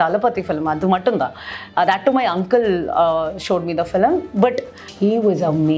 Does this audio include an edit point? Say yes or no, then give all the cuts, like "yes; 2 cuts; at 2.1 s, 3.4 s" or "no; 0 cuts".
yes; 1 cut; at 4.9 s